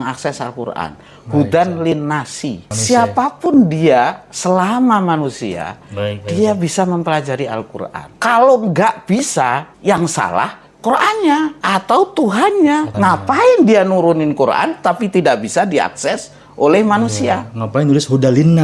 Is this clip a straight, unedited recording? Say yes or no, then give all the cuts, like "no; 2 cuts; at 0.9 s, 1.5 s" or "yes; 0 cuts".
no; 5 cuts; at 2.7 s, 8.0 s, 9.7 s, 11.6 s, 12.9 s